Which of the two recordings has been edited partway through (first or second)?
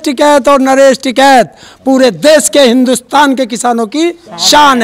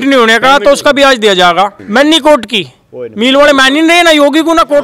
second